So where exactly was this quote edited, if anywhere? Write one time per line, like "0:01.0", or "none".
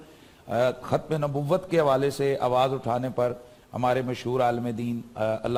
none